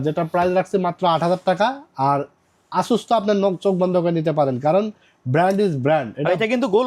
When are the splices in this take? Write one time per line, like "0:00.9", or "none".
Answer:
none